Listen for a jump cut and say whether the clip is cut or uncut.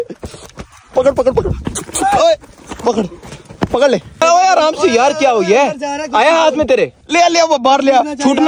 cut